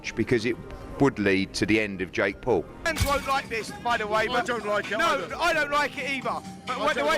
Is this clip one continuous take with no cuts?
no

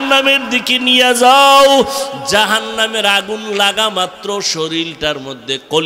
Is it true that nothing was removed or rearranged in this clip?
yes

